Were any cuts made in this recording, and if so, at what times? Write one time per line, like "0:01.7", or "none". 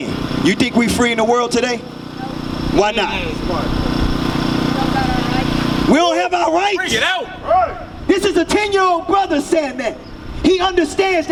none